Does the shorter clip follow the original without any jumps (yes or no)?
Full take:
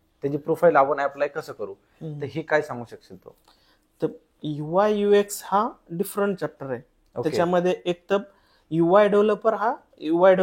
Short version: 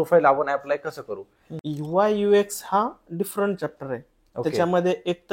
no